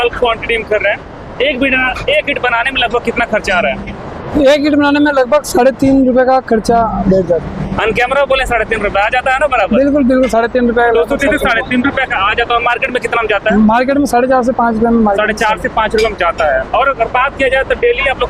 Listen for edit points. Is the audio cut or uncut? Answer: uncut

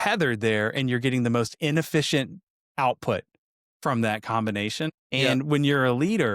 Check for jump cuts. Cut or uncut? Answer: cut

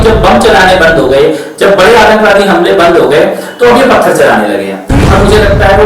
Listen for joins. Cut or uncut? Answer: cut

